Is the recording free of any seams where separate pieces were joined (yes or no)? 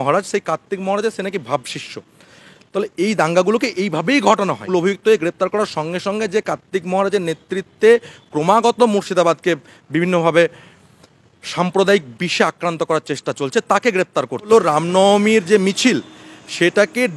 no